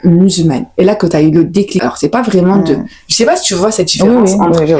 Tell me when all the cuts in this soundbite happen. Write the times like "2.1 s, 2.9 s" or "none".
none